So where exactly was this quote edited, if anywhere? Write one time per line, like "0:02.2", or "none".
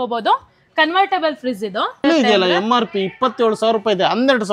0:02.0